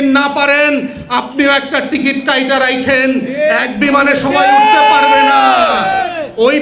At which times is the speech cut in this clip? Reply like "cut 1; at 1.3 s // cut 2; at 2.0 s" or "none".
none